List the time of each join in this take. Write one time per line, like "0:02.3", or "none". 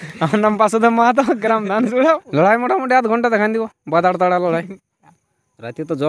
0:02.2